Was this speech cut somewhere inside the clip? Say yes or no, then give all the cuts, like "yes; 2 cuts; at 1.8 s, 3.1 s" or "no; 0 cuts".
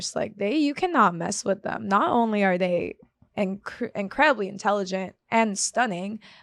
no; 0 cuts